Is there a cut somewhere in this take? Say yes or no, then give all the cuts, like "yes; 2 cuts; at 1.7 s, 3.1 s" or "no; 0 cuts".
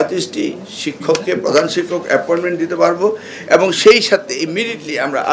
no; 0 cuts